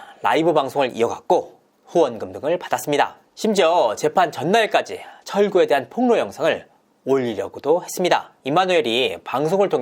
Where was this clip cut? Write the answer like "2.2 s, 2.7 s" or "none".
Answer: 3.2 s, 8.3 s